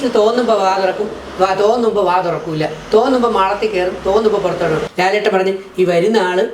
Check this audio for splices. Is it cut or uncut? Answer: cut